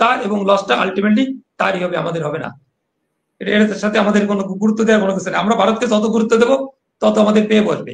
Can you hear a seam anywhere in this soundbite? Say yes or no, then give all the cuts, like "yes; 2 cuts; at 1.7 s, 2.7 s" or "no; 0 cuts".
no; 0 cuts